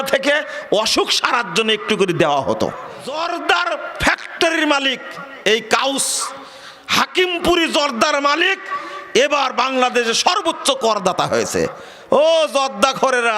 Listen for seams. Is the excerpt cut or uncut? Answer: cut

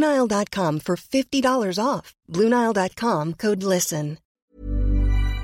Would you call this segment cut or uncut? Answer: cut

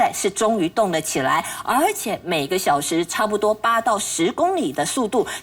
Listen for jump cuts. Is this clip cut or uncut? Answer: uncut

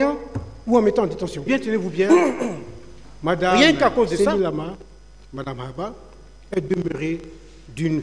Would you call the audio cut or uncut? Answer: cut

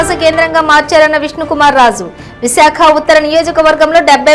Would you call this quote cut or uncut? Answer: uncut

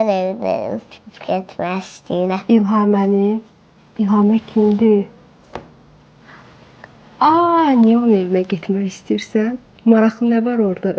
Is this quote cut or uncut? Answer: uncut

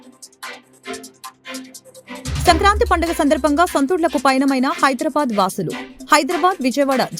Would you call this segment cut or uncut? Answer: cut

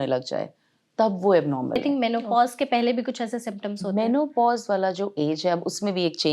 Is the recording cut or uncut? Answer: cut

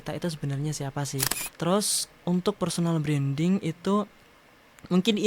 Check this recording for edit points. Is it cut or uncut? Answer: cut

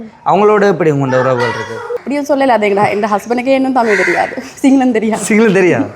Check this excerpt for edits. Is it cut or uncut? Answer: cut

